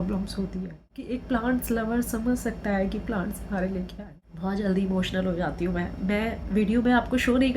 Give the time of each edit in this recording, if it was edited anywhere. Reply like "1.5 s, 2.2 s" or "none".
1.1 s, 4.0 s